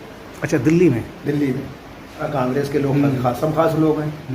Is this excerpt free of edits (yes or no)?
no